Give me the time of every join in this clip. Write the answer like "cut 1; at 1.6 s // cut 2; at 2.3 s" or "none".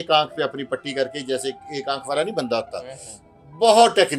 none